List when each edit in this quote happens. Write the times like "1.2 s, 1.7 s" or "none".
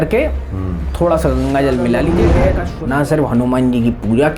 2.2 s